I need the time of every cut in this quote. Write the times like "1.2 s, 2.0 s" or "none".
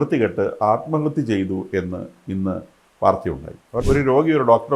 3.8 s